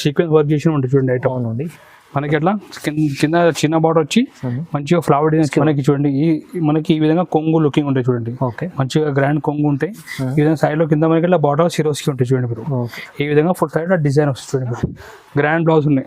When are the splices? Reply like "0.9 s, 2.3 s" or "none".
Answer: 5.5 s, 14.9 s